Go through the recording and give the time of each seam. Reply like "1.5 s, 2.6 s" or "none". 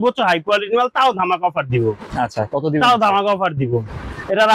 none